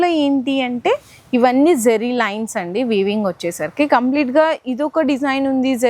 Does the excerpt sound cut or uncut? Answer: uncut